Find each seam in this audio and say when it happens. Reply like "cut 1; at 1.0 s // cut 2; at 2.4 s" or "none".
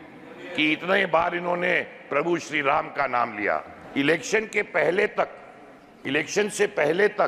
cut 1; at 3.7 s